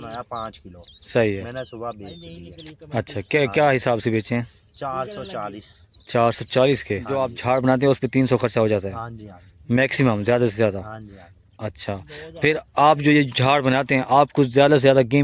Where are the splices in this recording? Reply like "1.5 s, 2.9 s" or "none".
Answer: 7.3 s